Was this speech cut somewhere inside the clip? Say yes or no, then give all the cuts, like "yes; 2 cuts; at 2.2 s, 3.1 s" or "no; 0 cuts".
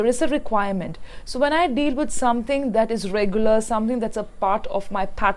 no; 0 cuts